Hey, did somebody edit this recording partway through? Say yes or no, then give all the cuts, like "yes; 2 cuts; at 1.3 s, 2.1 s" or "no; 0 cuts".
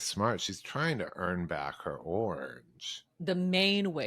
yes; 1 cut; at 3.1 s